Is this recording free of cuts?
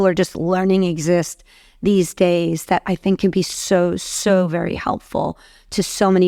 yes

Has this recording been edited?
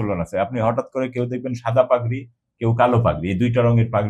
no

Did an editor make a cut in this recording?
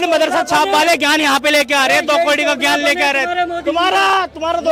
no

